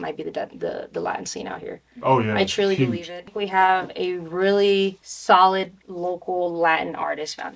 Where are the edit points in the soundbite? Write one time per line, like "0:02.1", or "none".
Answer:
0:03.2
0:05.1
0:05.8